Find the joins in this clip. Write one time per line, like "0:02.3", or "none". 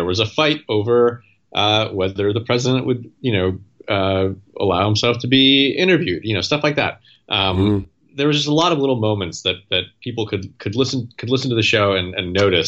none